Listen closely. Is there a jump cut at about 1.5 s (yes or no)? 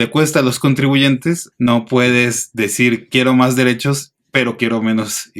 yes